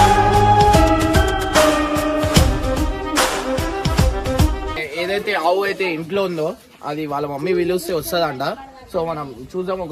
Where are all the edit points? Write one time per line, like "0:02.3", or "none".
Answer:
0:04.7